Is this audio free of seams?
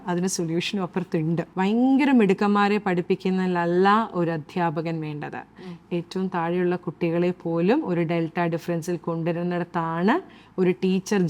no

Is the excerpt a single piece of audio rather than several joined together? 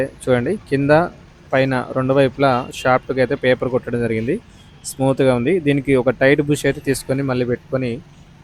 yes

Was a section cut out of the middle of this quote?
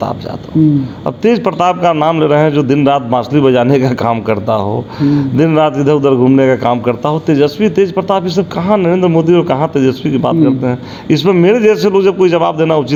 no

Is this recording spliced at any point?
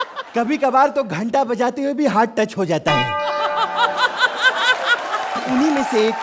no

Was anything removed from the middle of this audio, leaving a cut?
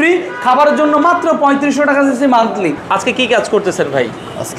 yes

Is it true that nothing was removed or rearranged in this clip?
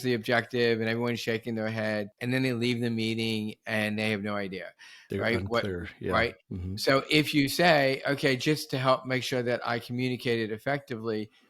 no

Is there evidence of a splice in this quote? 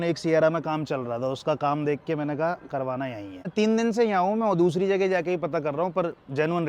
yes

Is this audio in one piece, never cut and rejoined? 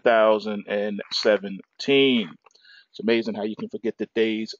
yes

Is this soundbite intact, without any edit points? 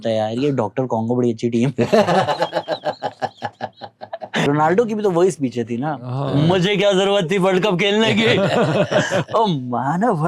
no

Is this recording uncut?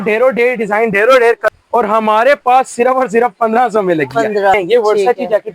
no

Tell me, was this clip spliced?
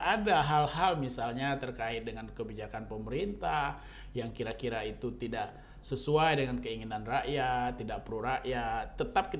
no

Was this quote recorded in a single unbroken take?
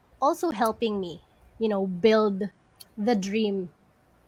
yes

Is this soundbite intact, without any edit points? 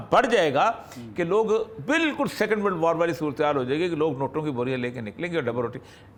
yes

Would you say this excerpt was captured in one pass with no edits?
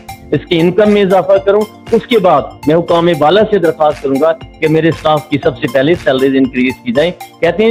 yes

